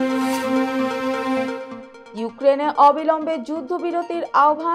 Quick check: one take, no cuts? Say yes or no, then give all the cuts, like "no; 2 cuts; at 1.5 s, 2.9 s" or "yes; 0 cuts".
no; 1 cut; at 1.7 s